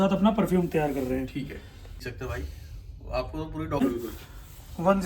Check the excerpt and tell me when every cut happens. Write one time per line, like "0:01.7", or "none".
0:02.0
0:03.8